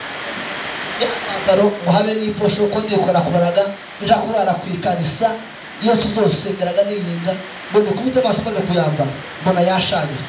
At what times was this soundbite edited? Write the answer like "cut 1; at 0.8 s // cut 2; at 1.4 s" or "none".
none